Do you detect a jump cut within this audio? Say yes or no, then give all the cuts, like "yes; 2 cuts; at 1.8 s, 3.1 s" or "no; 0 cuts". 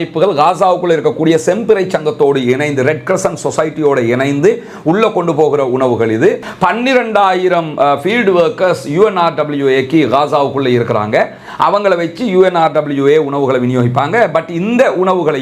yes; 1 cut; at 6.5 s